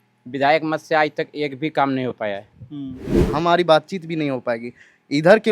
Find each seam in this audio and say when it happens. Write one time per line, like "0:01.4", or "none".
0:03.2